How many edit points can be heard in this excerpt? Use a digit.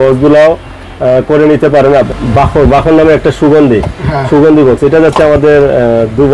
1